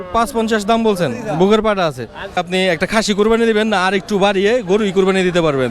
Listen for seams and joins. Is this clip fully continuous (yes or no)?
no